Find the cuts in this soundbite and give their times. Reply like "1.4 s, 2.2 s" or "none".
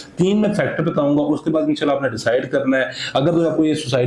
none